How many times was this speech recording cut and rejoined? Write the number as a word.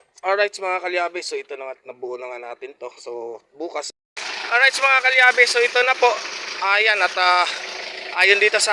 one